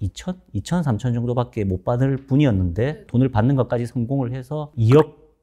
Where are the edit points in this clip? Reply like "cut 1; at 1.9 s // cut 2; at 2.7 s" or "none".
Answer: cut 1; at 3.0 s